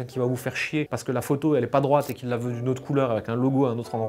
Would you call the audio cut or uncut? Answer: uncut